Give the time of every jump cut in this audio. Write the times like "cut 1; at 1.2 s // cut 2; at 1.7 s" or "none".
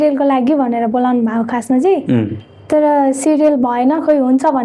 none